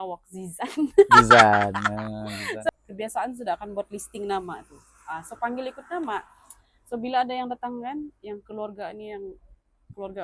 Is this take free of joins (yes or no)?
no